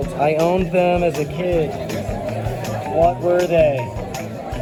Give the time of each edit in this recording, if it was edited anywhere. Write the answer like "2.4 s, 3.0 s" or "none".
none